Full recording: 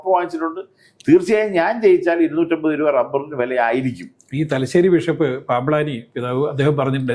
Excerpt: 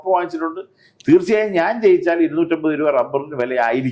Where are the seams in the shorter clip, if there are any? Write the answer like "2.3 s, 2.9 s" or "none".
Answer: none